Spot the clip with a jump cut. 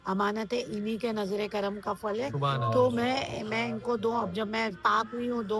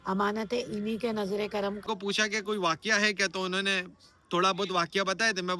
second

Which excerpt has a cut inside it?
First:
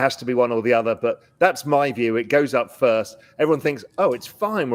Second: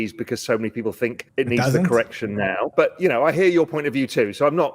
second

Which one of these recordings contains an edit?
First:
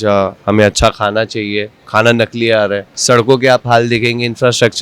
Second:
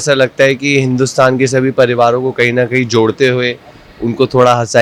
first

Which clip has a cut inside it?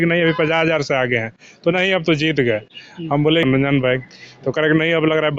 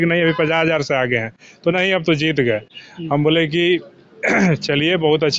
first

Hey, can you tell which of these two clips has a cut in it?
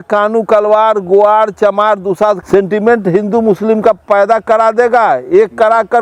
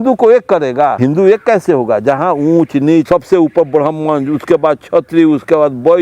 second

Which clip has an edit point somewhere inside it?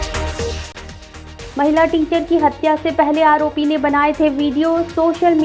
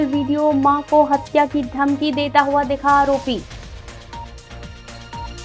first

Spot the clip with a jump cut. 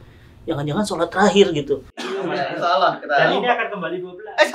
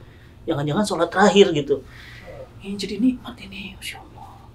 first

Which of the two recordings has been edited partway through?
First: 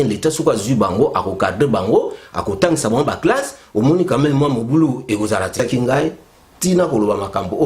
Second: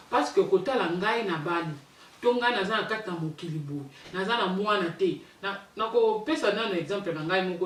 first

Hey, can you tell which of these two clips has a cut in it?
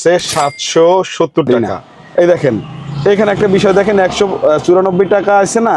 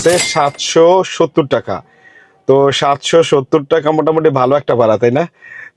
first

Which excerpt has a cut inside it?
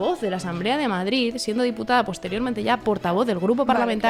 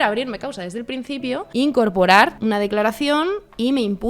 second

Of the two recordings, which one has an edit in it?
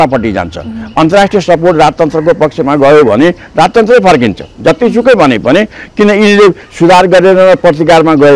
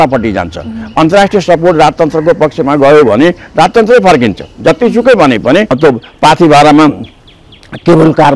second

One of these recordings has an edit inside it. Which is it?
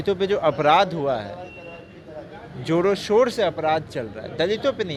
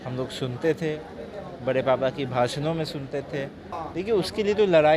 second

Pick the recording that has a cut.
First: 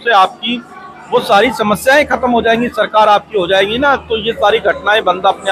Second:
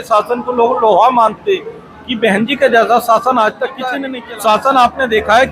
second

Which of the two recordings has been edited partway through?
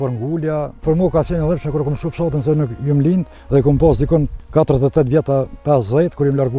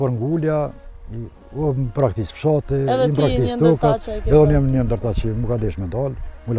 first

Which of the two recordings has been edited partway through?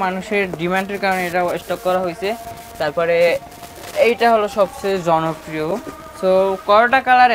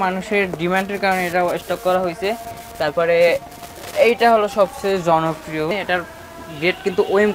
second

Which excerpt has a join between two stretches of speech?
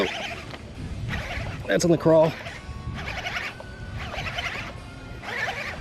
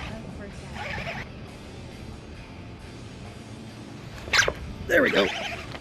second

